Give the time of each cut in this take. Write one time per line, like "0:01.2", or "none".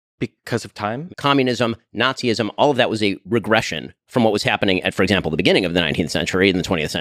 0:01.0